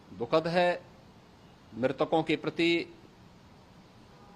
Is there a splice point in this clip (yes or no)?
no